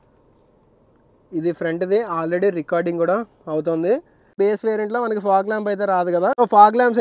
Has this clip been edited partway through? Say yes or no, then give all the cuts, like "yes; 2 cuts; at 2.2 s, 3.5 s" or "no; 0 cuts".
yes; 1 cut; at 4.3 s